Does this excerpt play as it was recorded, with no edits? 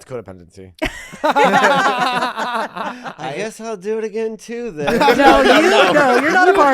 no; 1 cut; at 3.1 s

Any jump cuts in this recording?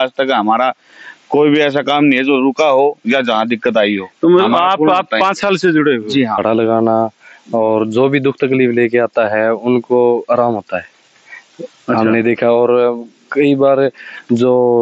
yes; 1 cut; at 6.4 s

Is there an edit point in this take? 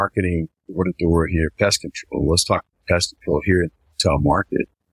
no; 0 cuts

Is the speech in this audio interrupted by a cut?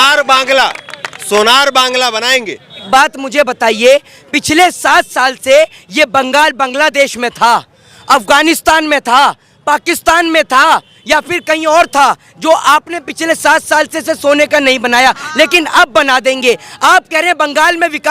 yes; 1 cut; at 2.8 s

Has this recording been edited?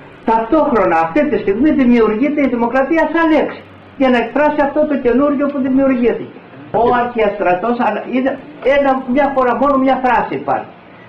yes; 1 cut; at 6.7 s

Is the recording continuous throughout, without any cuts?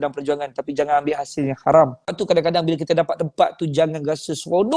no; 1 cut; at 2.2 s

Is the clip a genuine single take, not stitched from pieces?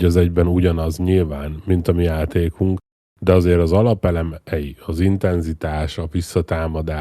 yes; 0 cuts

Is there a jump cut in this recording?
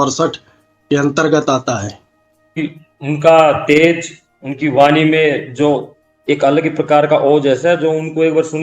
yes; 1 cut; at 2.6 s

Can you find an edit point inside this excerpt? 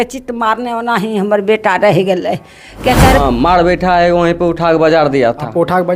yes; 1 cut; at 3.2 s

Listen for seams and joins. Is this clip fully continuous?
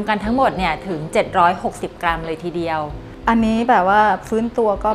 no; 1 cut; at 3.0 s

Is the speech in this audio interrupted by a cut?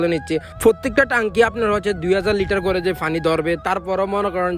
no; 0 cuts

